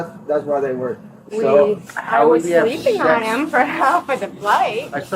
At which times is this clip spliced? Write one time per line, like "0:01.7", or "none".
0:01.1